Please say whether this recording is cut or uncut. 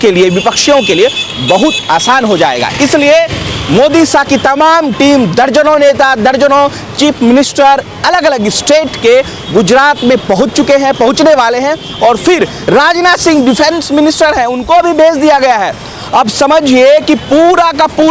uncut